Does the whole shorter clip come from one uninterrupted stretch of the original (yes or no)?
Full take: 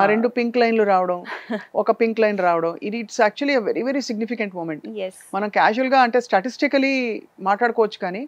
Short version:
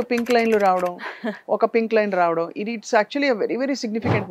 yes